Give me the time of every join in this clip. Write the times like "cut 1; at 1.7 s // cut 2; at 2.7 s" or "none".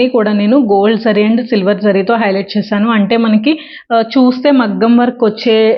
none